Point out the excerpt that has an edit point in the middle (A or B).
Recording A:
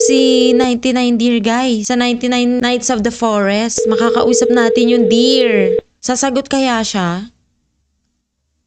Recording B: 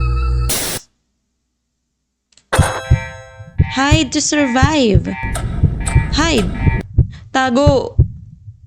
A